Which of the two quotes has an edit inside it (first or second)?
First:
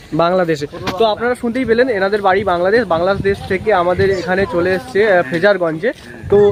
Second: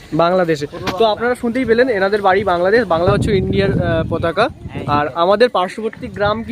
second